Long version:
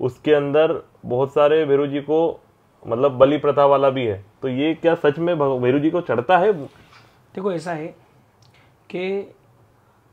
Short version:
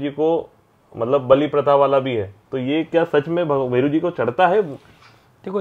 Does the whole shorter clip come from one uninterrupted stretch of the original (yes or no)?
yes